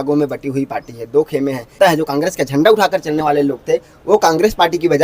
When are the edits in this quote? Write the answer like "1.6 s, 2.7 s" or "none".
1.8 s